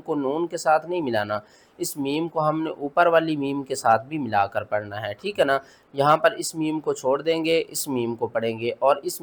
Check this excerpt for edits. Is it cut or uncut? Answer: uncut